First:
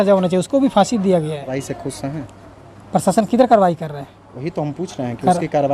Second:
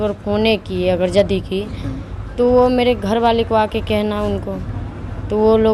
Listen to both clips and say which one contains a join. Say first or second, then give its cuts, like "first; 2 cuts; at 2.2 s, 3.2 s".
first; 1 cut; at 1.6 s